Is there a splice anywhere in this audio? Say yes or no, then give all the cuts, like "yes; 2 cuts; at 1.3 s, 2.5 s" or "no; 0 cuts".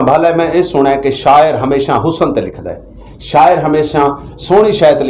no; 0 cuts